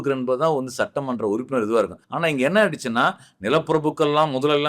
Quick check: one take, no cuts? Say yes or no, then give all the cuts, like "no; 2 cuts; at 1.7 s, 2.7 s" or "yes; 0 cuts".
no; 1 cut; at 2.0 s